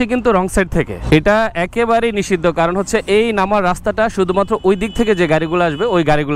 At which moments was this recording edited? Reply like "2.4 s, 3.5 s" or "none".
none